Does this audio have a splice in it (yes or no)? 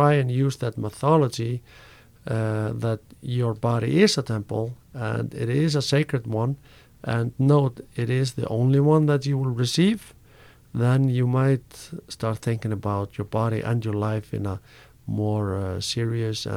no